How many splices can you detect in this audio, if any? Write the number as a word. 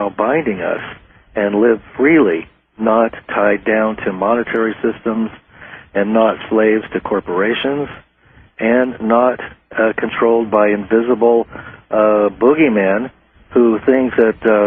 one